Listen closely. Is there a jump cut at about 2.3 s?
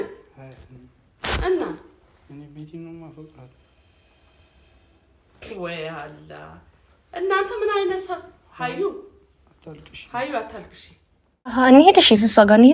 no; 1 cut; at 11.6 s

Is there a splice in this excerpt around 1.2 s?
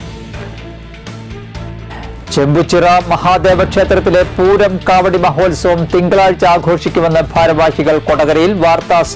yes; 1 cut; at 1.2 s

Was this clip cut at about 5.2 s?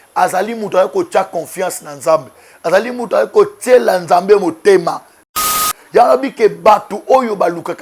yes; 1 cut; at 5.2 s

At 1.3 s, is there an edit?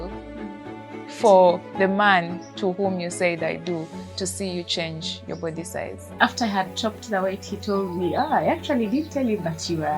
no; 1 cut; at 6.1 s

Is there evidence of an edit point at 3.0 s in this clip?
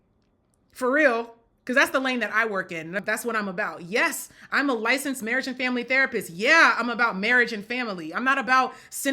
yes; 1 cut; at 3.0 s

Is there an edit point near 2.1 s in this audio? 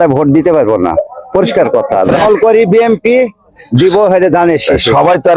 yes; 1 cut; at 2.1 s

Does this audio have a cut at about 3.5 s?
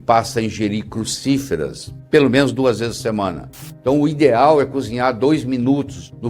yes; 1 cut; at 3.5 s

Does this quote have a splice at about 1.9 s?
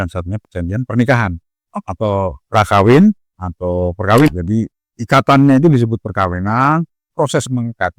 no; 1 cut; at 4.3 s

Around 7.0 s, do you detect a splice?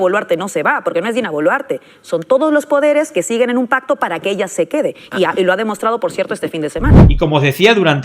yes; 1 cut; at 7.0 s

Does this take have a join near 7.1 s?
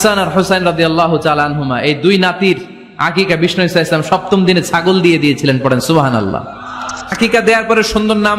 yes; 1 cut; at 7.1 s

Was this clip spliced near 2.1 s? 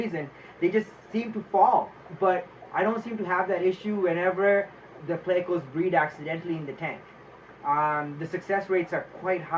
yes; 1 cut; at 2.1 s

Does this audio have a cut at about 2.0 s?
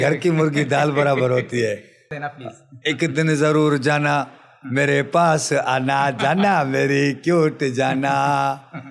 yes; 1 cut; at 2.0 s

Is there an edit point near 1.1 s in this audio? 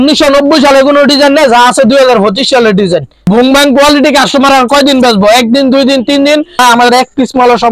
no; 2 cuts; at 3.1 s, 6.6 s

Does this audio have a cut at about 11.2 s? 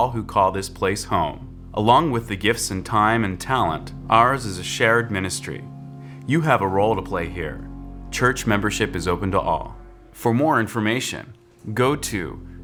no; 0 cuts

